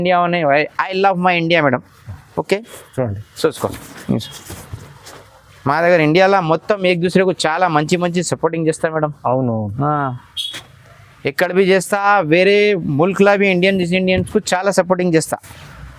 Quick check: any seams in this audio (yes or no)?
no